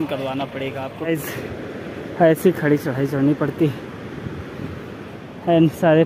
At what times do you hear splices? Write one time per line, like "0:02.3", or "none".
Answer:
0:00.9